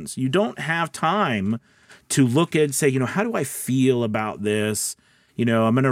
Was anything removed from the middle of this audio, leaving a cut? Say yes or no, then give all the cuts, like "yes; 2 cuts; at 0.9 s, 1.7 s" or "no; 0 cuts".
no; 0 cuts